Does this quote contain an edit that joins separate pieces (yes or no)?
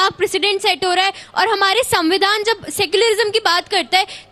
no